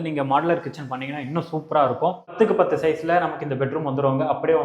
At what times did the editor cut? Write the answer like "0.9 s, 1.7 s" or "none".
2.3 s